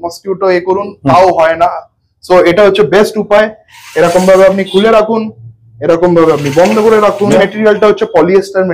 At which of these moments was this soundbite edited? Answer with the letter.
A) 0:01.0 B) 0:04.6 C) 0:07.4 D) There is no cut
C